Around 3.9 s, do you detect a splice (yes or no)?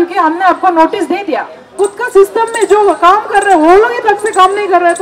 no